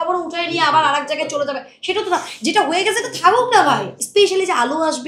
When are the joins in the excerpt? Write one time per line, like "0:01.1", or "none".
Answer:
0:04.0